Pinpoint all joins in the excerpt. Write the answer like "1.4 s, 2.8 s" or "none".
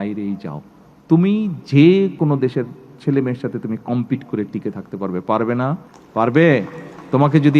2.2 s, 5.9 s